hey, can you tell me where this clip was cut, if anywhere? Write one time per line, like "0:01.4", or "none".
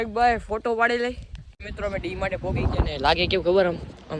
0:01.6